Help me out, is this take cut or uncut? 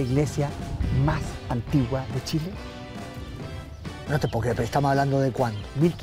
uncut